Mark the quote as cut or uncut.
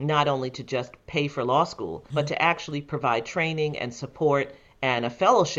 cut